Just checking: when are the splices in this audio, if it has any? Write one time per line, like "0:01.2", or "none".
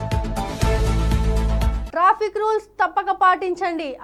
none